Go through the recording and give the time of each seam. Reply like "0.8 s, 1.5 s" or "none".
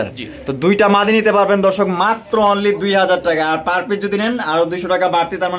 none